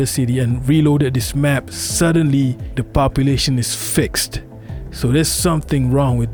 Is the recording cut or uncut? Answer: uncut